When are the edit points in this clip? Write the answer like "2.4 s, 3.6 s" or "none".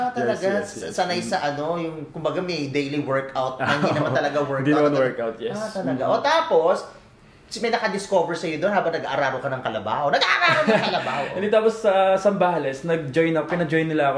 none